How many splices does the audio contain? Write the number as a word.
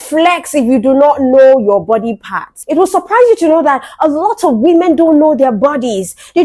one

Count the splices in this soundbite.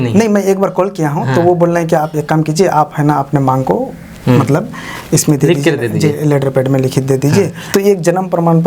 one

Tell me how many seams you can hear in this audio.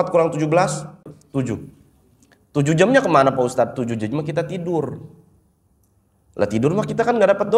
one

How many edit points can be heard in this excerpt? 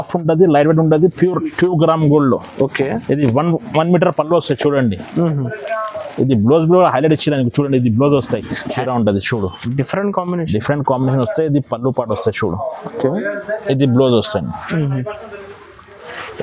one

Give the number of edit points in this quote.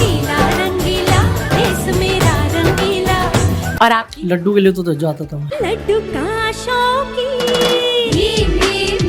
one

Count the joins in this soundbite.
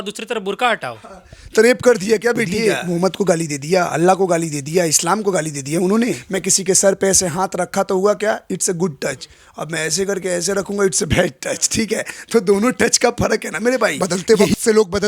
three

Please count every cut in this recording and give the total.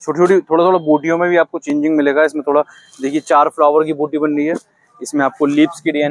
zero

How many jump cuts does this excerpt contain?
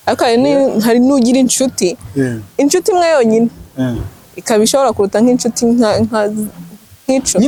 zero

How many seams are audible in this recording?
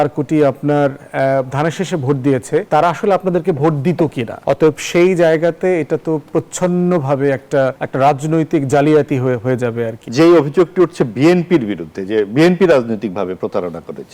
four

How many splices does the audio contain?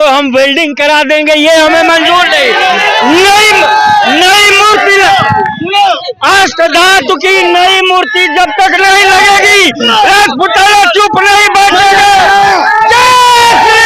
zero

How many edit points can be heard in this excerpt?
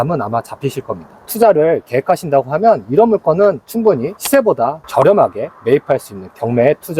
one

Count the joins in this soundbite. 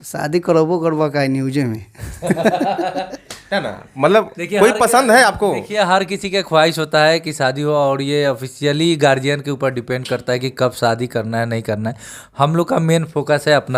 zero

